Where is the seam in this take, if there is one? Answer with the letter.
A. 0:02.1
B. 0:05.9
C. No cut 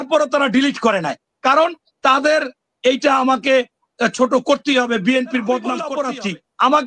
B